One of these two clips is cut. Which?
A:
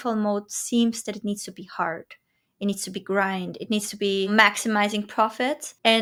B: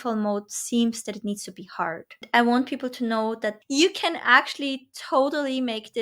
B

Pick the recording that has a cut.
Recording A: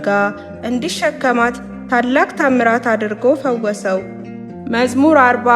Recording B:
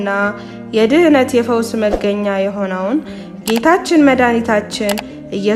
A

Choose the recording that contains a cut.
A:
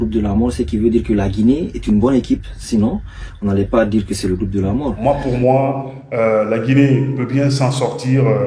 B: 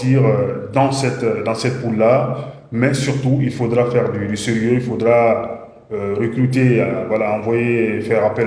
A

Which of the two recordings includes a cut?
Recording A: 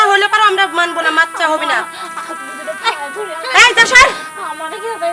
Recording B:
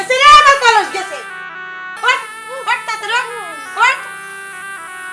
B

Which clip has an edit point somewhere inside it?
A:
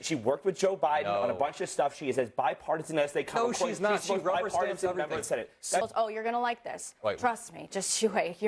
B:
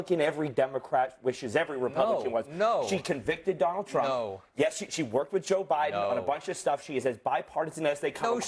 A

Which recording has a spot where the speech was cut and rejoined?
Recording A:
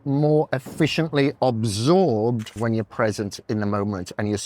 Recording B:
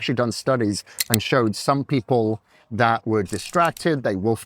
A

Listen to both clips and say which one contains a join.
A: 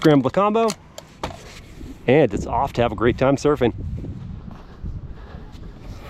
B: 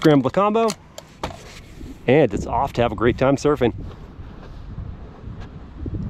B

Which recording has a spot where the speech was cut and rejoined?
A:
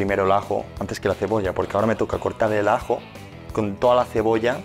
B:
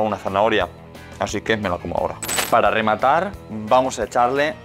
B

